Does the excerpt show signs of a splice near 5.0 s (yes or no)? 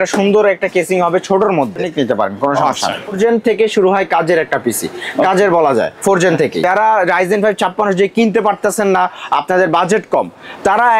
no